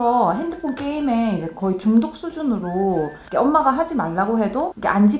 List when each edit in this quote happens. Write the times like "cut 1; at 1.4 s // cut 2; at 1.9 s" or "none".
none

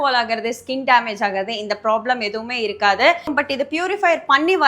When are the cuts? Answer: cut 1; at 3.3 s

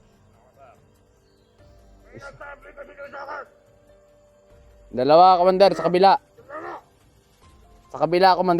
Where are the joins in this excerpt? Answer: cut 1; at 3.6 s // cut 2; at 4.9 s

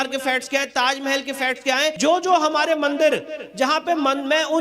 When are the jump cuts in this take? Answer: cut 1; at 2.0 s

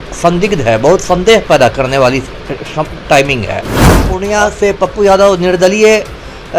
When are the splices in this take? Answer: cut 1; at 4.1 s

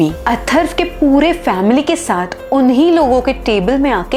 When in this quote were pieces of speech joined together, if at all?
none

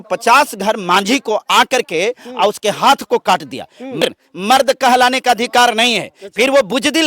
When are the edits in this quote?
cut 1; at 4.0 s

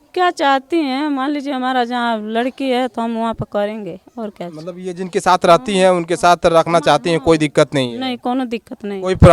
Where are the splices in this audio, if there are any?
none

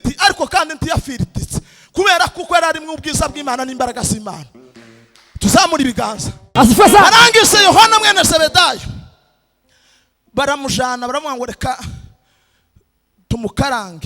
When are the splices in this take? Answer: cut 1; at 6.5 s

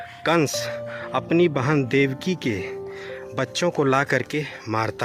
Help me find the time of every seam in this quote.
none

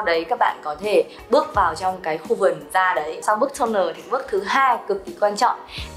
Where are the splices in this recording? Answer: cut 1; at 3.2 s

